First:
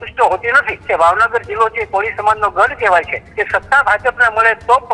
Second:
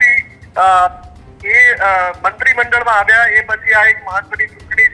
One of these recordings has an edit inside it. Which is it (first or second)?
first